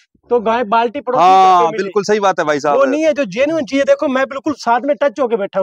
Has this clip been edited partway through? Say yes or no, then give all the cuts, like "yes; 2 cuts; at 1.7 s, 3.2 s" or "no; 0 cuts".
no; 0 cuts